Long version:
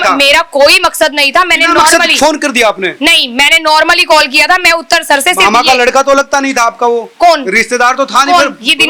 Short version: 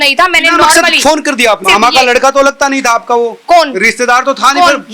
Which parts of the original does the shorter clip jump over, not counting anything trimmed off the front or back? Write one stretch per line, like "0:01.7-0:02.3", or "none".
0:02.8-0:05.3